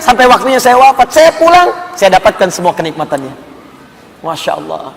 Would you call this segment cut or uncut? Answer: uncut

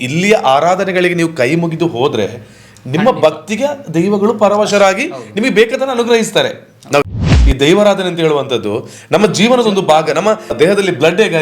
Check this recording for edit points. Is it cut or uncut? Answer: cut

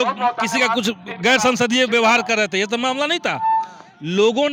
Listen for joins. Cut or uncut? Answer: uncut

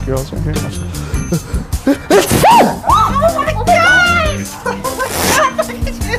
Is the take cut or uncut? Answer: uncut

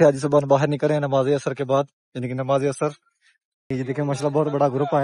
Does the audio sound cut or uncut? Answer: cut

